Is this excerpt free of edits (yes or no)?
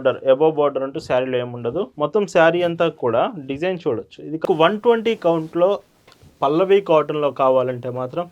no